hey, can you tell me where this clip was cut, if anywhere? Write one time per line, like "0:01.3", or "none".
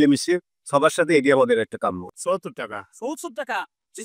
0:02.0